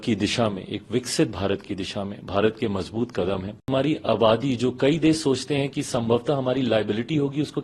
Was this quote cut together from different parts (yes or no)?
yes